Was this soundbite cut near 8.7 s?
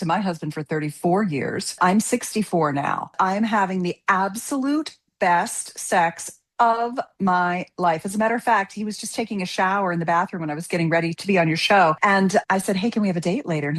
no; 3 cuts; at 1.8 s, 3.1 s, 12.0 s

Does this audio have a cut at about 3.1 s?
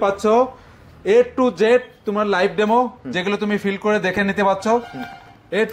no; 0 cuts

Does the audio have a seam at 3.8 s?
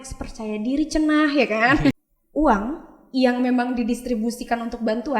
no; 1 cut; at 1.9 s

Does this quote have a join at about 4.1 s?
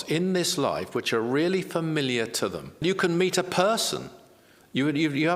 no; 1 cut; at 2.8 s

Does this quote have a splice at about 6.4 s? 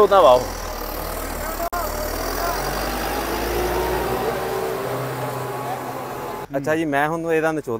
yes; 1 cut; at 6.4 s

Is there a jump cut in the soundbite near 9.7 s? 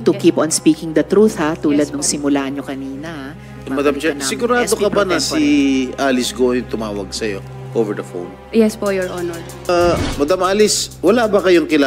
yes; 1 cut; at 9.7 s

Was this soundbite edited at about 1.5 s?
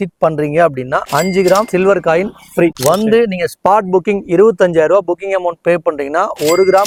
no; 0 cuts

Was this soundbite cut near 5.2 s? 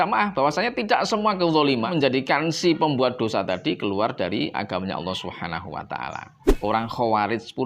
no; 2 cuts; at 1.9 s, 6.4 s

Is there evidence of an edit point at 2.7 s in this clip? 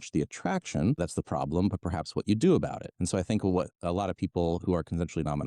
no; 1 cut; at 1.0 s

